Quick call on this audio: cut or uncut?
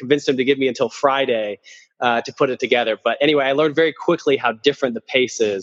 uncut